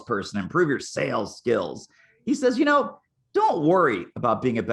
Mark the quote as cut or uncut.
uncut